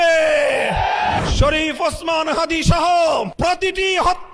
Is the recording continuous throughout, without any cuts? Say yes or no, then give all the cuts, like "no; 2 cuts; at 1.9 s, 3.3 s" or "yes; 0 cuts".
no; 2 cuts; at 1.2 s, 3.3 s